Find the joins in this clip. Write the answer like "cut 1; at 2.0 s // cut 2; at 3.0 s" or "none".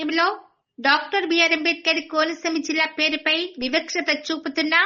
none